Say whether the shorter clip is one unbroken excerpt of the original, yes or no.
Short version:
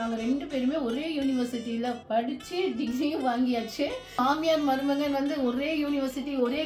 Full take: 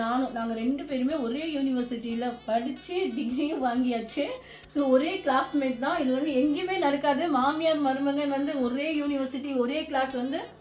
no